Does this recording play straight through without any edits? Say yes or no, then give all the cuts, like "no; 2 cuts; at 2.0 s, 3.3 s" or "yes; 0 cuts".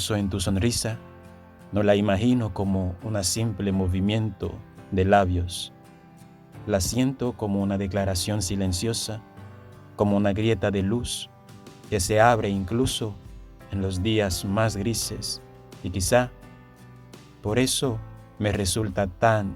yes; 0 cuts